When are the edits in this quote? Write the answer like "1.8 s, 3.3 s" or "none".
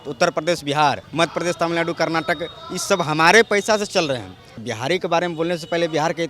1.0 s, 4.4 s